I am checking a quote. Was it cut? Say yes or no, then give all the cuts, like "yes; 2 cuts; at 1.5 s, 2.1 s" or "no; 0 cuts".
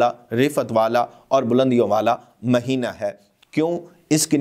no; 0 cuts